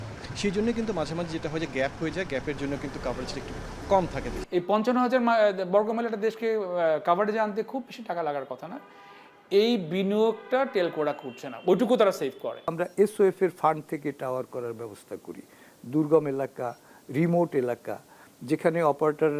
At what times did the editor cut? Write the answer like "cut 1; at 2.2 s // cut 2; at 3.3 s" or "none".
cut 1; at 4.4 s // cut 2; at 12.7 s